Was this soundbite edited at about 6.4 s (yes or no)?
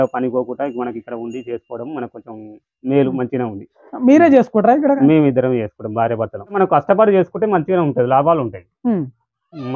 yes